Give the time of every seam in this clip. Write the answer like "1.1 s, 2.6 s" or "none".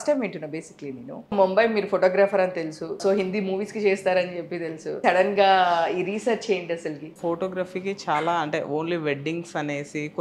1.3 s, 3.0 s, 4.9 s, 7.1 s